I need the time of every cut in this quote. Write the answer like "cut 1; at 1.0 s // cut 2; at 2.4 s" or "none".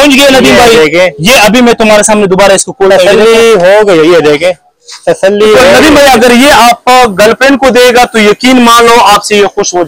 cut 1; at 5.7 s